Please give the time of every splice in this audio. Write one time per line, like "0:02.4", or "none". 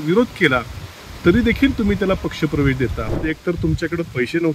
0:03.1